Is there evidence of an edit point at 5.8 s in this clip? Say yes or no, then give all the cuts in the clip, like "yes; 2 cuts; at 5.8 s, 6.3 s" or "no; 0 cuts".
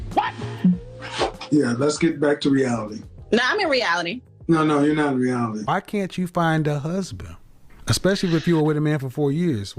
yes; 1 cut; at 5.8 s